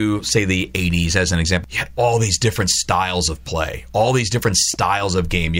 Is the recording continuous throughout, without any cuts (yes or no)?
no